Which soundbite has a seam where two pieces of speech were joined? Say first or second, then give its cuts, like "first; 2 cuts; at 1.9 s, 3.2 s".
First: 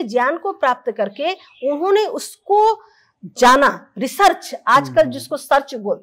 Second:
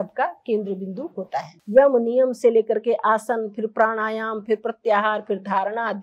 second; 1 cut; at 1.6 s